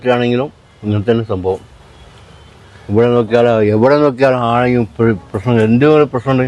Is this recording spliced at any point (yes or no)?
no